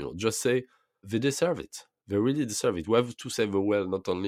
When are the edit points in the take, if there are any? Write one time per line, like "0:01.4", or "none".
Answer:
0:01.0

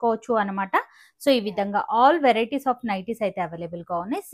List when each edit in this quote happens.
none

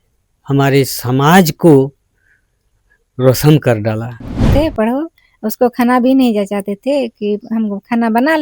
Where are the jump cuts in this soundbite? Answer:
0:04.5

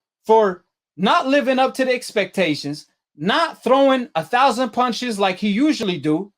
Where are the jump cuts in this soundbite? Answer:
none

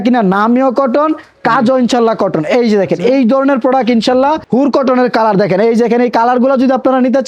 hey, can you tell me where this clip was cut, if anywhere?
0:04.4

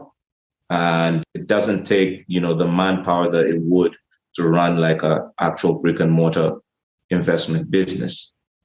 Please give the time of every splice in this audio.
0:01.3

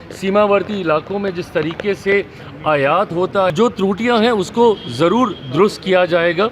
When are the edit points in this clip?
0:03.5

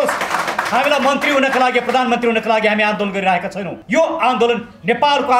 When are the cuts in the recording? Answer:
0:03.8

